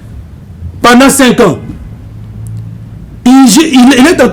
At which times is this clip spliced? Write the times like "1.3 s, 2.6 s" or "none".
none